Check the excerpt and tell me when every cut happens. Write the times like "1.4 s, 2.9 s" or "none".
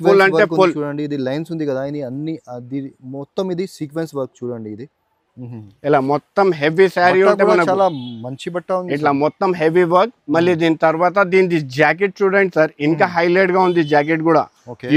none